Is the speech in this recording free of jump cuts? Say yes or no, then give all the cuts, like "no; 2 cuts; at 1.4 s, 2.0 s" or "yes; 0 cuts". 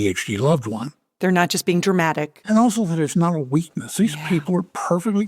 no; 1 cut; at 2.3 s